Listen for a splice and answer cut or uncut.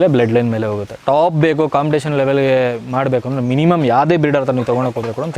uncut